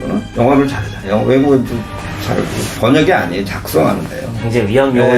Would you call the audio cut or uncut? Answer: cut